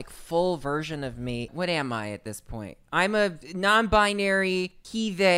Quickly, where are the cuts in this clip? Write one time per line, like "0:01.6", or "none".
0:01.5
0:03.5